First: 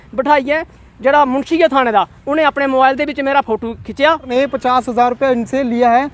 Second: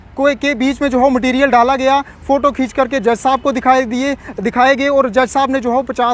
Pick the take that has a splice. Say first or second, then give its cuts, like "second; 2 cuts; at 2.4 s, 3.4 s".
first; 1 cut; at 4.2 s